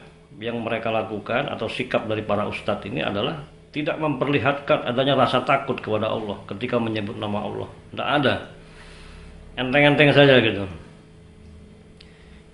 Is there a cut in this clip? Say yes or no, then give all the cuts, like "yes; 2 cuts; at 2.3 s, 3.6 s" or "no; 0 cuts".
no; 0 cuts